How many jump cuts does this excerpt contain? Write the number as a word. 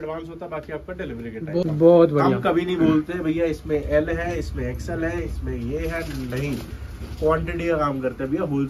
one